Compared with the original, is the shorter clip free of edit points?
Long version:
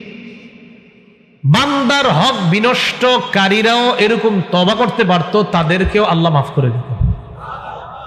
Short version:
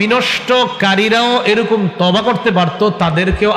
yes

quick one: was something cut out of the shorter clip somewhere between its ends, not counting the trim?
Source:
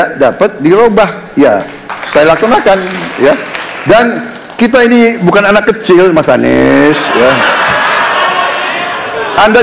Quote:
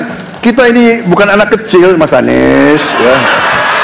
no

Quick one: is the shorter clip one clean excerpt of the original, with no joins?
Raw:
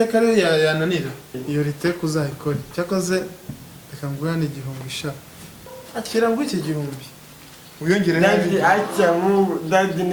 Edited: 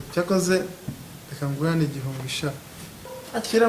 yes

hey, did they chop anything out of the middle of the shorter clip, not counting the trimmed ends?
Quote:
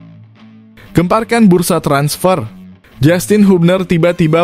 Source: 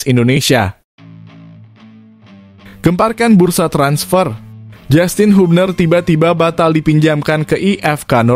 yes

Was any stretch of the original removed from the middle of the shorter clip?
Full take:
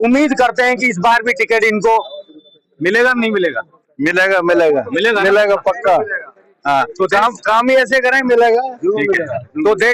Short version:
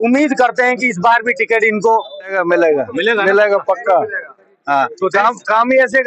yes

